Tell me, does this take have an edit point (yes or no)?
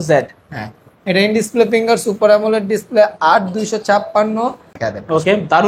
yes